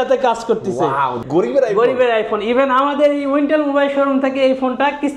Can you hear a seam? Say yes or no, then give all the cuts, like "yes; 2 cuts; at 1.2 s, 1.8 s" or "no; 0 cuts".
yes; 1 cut; at 1.1 s